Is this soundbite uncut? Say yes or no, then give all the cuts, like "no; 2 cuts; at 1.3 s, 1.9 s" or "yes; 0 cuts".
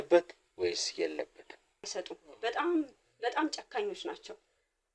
no; 1 cut; at 1.9 s